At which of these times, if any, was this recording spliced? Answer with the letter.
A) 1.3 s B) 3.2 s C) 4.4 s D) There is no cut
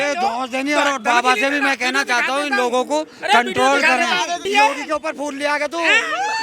C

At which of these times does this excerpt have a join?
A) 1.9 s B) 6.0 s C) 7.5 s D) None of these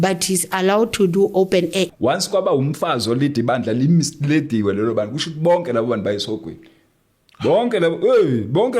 A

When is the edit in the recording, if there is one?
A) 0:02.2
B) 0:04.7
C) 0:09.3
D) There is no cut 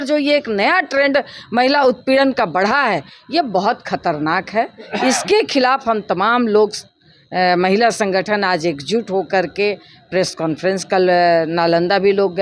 D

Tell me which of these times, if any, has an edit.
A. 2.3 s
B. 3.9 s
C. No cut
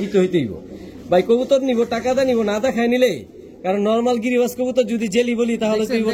C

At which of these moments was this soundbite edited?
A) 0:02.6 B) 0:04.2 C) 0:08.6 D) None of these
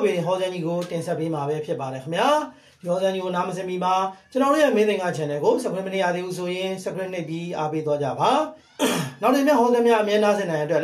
C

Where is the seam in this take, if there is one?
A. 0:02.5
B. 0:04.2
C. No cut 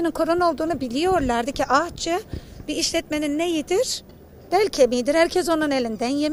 C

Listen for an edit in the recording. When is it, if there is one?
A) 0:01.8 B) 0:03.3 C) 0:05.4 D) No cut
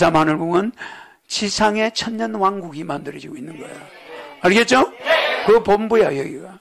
D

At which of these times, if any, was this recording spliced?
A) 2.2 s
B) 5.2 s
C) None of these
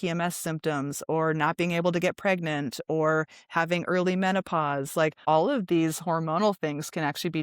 B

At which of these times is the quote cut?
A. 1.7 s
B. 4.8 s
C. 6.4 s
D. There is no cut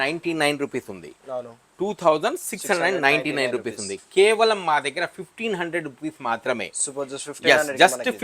D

